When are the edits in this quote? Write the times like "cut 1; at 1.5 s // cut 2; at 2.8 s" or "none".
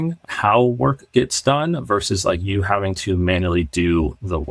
none